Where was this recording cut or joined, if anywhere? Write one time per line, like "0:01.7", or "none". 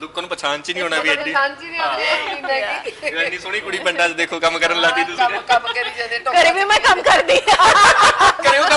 none

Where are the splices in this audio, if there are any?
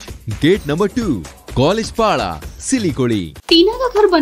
0:03.3

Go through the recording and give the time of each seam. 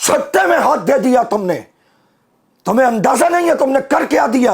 none

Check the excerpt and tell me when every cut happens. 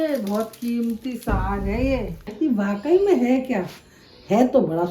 0:02.3

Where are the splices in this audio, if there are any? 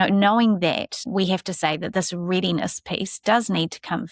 0:01.0

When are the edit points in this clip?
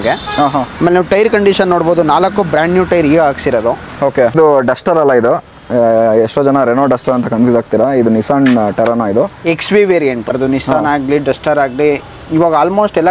0:04.3
0:10.3

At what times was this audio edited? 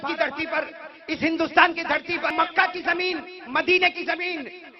0:02.3

